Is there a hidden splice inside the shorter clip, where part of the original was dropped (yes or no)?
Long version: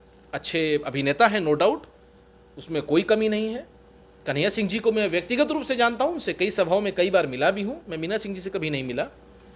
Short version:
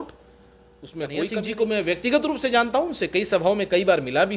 yes